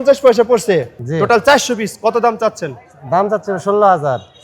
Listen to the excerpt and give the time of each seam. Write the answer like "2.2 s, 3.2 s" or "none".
0.9 s